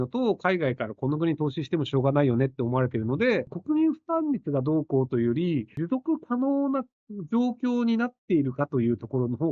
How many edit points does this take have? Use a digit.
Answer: 2